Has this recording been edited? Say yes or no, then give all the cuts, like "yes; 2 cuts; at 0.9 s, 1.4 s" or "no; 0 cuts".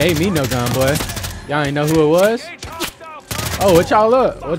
no; 0 cuts